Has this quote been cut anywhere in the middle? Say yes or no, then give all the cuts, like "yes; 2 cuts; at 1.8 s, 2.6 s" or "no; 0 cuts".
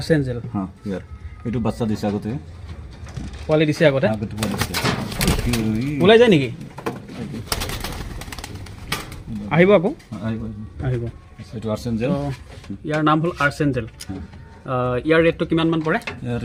no; 0 cuts